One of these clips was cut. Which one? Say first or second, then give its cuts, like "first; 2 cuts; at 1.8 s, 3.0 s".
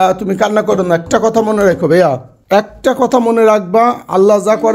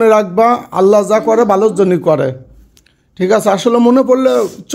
first; 1 cut; at 2.3 s